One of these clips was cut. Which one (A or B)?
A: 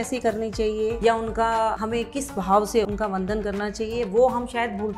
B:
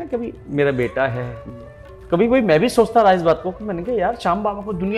A